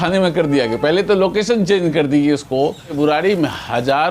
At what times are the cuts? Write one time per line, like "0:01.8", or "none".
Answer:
0:02.9